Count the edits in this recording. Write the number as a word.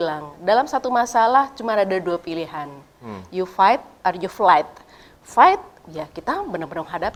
zero